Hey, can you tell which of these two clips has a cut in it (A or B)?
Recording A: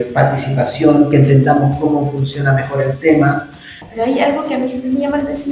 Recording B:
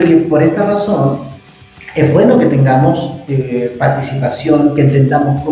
A